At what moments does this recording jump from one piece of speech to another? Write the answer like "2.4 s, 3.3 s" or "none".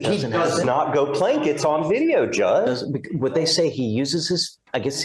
none